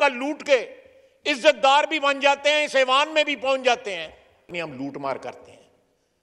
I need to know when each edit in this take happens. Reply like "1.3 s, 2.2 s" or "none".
4.5 s